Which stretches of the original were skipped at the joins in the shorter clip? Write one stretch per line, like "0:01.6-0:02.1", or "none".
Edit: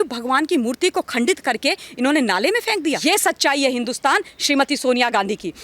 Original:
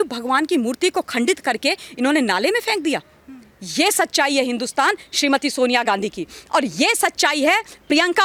0:03.0-0:03.7